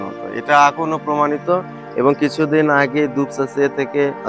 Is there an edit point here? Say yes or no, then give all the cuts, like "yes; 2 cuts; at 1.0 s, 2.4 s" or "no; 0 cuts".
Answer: no; 0 cuts